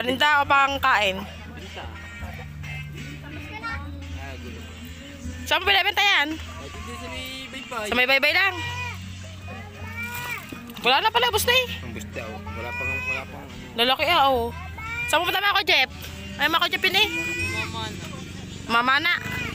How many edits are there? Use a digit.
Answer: 0